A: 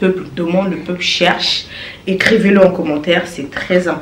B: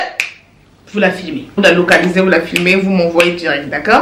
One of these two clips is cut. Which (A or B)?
B